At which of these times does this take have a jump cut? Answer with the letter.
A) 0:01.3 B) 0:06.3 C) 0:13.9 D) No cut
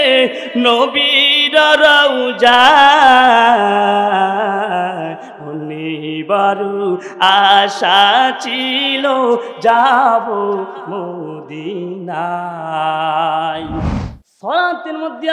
C